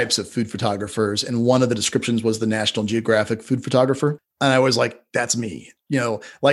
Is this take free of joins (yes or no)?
no